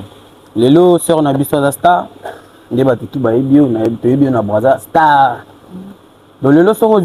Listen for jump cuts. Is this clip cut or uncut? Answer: uncut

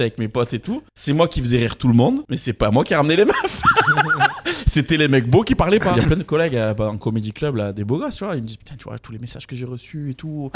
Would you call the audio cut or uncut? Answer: cut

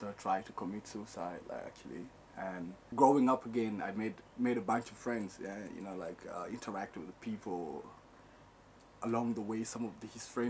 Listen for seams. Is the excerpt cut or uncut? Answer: cut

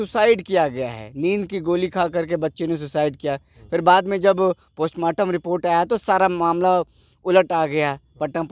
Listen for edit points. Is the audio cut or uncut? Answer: uncut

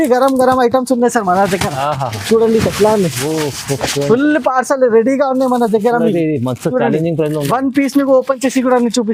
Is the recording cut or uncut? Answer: uncut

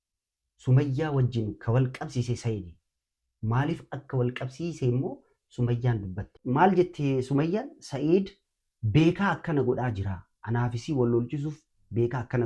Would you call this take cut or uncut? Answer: cut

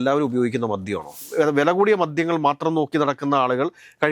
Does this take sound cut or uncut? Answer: cut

